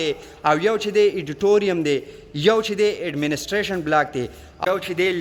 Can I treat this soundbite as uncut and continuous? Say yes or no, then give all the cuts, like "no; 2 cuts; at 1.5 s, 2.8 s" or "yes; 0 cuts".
yes; 0 cuts